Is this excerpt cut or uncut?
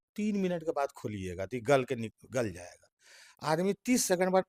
uncut